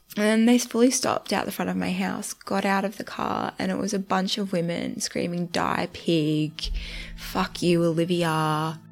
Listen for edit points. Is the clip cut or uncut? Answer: uncut